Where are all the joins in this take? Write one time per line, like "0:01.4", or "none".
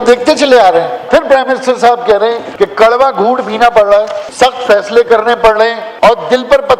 0:01.0
0:02.4
0:04.2
0:05.8